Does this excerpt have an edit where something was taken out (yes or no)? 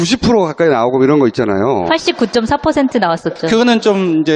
yes